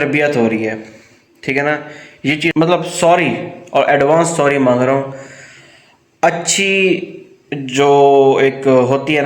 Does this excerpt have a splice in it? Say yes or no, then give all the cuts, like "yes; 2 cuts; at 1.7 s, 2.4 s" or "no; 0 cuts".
yes; 1 cut; at 2.5 s